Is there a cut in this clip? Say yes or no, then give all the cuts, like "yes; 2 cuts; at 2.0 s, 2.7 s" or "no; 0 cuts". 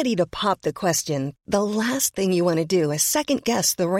no; 0 cuts